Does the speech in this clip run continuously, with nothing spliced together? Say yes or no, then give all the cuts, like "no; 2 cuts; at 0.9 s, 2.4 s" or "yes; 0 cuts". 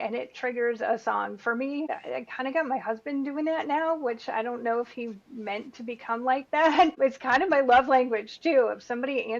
no; 2 cuts; at 1.9 s, 7.0 s